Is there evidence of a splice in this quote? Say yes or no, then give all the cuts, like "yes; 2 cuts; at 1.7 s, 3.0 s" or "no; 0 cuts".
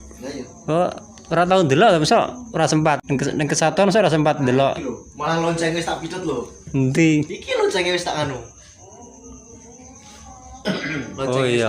yes; 1 cut; at 3.0 s